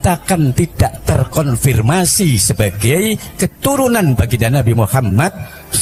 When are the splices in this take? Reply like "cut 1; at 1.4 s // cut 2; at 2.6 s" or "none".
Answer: none

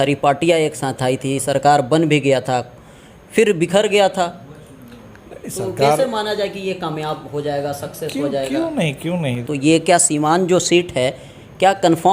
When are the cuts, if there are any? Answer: cut 1; at 9.4 s

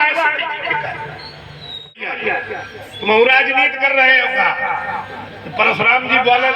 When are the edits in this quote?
cut 1; at 1.9 s

